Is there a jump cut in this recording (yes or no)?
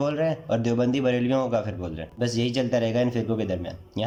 no